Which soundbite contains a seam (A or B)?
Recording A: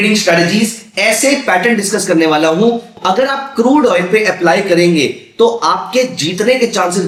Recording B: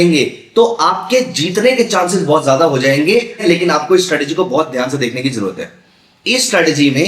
B